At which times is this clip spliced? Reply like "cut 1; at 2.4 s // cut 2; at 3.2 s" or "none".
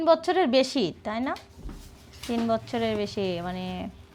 none

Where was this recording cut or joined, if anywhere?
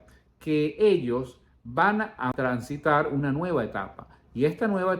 cut 1; at 2.3 s

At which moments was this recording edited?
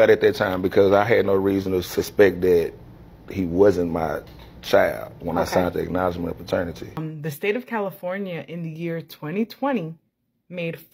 cut 1; at 7.0 s

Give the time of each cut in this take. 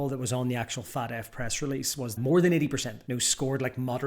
cut 1; at 2.1 s

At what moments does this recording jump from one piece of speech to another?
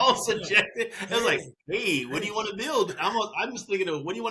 none

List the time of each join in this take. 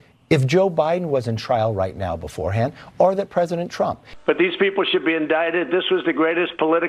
cut 1; at 4.0 s

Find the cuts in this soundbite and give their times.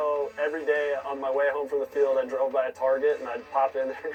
none

